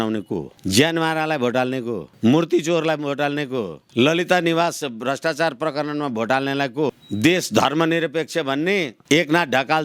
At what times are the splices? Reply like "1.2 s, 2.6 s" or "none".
none